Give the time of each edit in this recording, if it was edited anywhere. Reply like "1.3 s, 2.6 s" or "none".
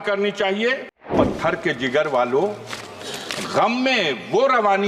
1.1 s